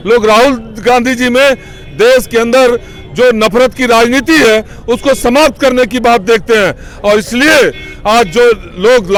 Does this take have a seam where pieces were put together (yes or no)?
no